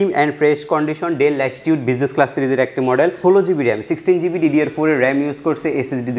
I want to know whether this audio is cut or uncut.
cut